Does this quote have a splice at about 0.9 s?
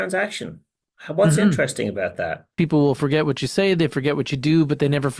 no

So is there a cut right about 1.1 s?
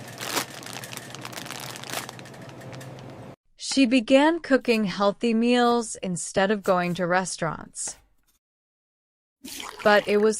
no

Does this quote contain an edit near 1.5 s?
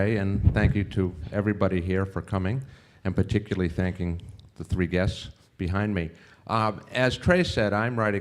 yes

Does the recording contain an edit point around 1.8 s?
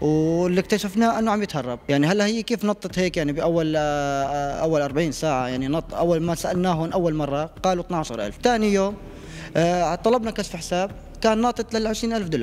yes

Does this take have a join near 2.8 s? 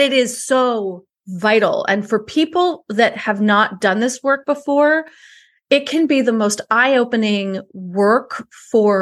no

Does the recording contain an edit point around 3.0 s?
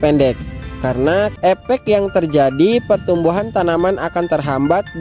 no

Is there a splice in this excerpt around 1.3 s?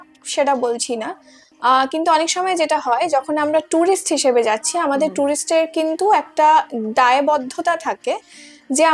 no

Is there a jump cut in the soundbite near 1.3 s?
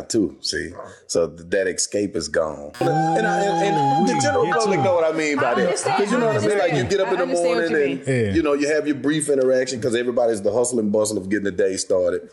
no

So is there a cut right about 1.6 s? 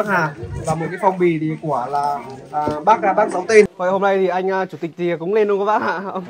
no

